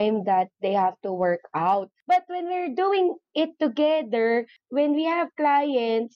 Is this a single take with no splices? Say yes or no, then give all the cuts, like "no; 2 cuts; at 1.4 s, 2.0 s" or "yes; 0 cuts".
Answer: no; 1 cut; at 2.0 s